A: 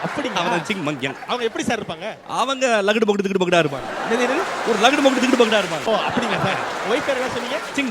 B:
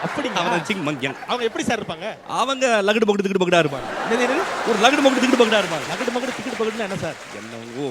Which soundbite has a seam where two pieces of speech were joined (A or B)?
A